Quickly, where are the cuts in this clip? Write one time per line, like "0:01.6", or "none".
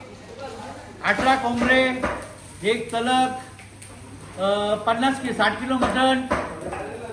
none